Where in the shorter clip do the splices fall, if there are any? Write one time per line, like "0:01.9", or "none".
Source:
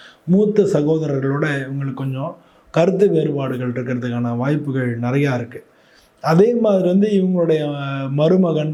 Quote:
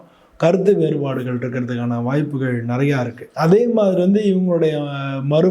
0:03.2

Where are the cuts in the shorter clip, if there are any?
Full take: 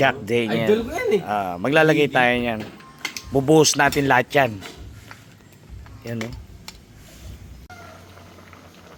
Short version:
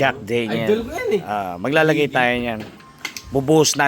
none

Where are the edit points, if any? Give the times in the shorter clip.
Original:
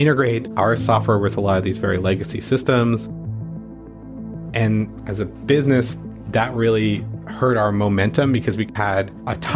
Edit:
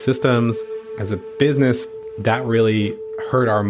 0:00.9

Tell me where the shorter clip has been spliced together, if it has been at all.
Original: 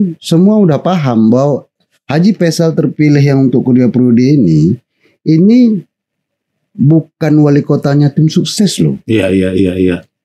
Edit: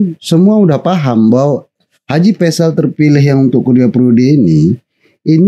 none

